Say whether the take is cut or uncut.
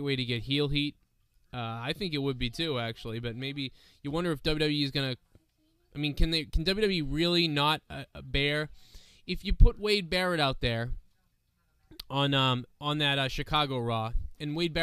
cut